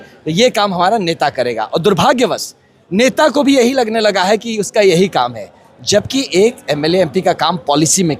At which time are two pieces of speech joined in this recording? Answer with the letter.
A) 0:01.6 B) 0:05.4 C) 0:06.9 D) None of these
D